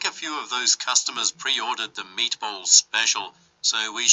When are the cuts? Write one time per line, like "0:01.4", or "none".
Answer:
none

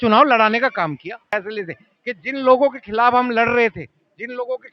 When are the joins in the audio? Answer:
0:01.2

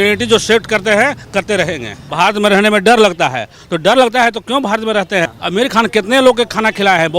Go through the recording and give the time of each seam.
0:02.0
0:05.3

